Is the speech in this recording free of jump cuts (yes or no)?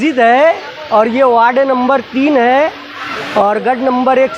yes